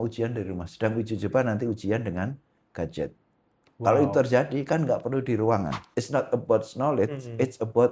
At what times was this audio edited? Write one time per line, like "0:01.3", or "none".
0:05.8